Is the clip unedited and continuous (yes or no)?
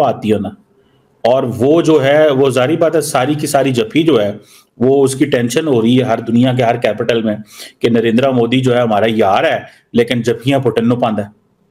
yes